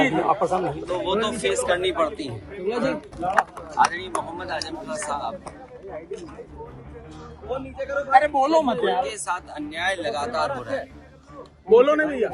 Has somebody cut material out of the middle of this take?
yes; 1 cut; at 3.1 s

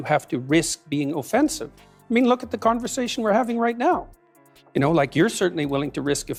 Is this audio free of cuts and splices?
yes; 0 cuts

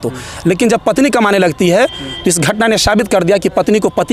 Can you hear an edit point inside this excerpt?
no; 0 cuts

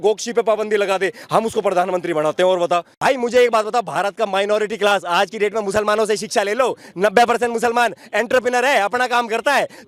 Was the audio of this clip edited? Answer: no; 0 cuts

